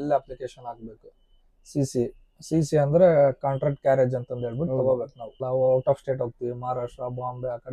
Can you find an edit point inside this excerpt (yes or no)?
yes